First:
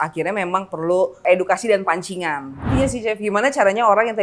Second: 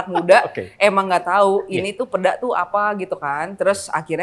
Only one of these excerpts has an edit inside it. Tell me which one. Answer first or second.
first